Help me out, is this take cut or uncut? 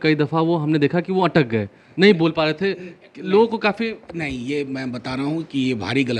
uncut